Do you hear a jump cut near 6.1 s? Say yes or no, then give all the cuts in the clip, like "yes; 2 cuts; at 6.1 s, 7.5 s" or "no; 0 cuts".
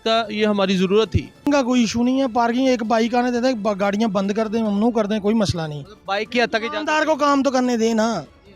no; 1 cut; at 1.5 s